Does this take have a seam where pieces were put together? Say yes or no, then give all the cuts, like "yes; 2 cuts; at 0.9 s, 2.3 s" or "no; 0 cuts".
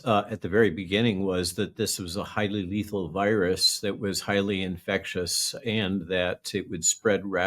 no; 0 cuts